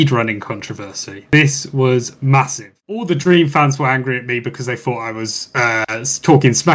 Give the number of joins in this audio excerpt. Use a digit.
1